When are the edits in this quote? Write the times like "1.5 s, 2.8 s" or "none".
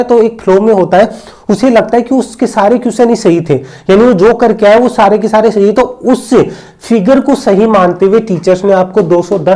none